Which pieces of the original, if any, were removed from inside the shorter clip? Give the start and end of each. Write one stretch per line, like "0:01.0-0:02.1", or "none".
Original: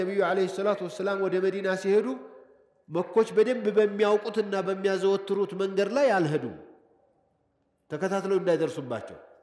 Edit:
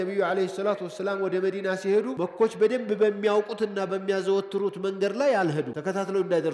0:02.1-0:02.9
0:06.5-0:07.9